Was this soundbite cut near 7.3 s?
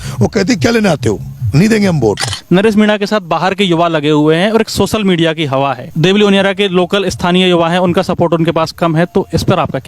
no; 1 cut; at 2.3 s

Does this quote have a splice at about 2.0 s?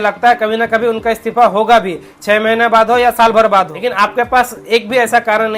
no; 1 cut; at 3.8 s

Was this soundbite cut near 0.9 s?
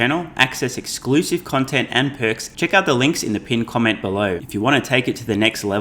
no; 2 cuts; at 2.5 s, 4.4 s

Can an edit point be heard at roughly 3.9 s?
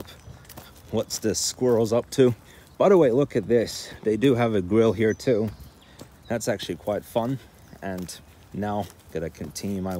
no; 0 cuts

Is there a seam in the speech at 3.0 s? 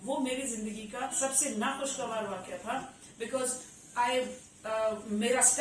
no; 1 cut; at 1.1 s

